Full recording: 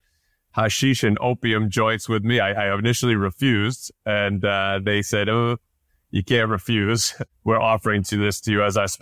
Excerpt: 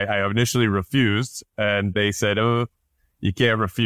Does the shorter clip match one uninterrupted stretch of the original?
no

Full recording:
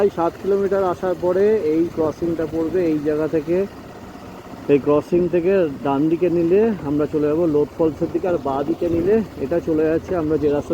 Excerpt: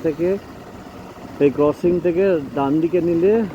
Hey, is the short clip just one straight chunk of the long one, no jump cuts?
yes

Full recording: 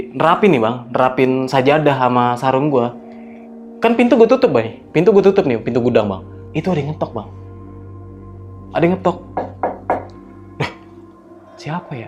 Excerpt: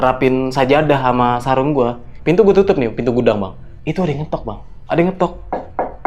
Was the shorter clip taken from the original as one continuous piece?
no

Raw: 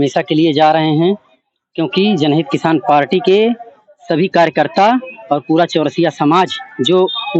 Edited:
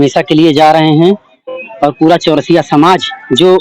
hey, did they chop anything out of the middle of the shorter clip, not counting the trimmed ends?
yes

